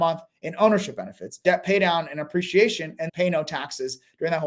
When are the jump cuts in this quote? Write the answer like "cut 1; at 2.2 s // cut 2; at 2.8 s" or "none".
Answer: cut 1; at 1.4 s // cut 2; at 3.0 s